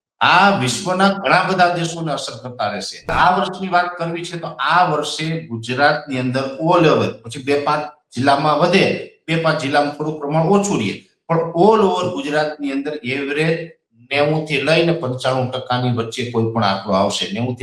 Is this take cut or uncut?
cut